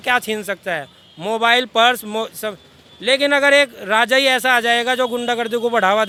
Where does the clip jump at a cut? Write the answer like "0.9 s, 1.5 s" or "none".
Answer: none